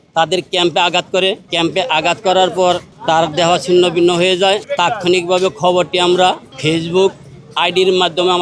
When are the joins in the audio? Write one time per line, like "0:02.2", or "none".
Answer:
0:01.5
0:02.9
0:04.7
0:06.5